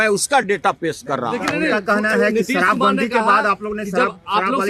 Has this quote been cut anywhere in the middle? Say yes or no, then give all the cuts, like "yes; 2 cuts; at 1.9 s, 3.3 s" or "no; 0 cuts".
no; 0 cuts